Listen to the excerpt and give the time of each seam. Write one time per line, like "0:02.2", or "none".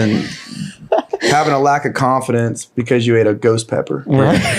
0:02.7